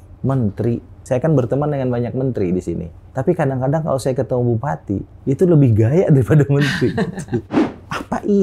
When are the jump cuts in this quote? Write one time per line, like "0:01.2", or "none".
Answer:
0:01.0
0:03.0
0:05.1
0:07.6